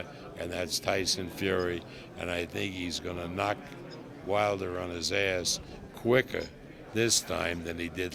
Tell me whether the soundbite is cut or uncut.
uncut